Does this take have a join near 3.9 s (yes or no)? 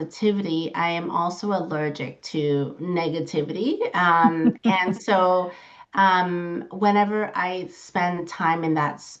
no